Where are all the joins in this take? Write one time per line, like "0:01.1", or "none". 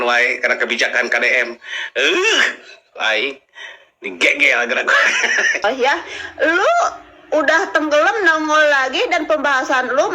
0:05.6